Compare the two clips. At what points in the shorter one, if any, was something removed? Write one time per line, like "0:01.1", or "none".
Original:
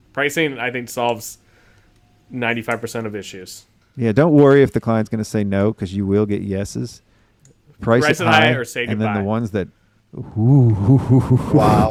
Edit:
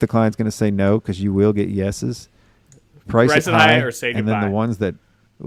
none